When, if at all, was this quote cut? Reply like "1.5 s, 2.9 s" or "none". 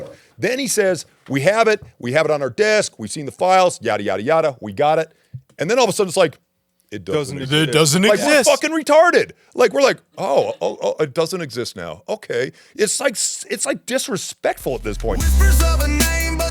15.2 s